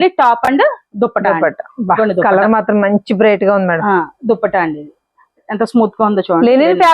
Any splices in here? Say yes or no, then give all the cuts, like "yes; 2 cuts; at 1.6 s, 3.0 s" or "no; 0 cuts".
yes; 1 cut; at 5.5 s